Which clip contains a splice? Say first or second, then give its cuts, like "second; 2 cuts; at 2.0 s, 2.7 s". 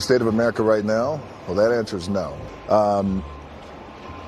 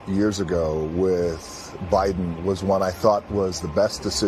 first; 1 cut; at 2.4 s